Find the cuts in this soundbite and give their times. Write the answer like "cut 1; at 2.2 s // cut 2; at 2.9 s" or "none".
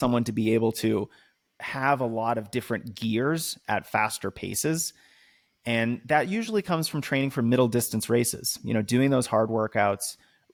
none